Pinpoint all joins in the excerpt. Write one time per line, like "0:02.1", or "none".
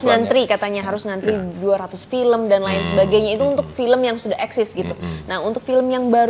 none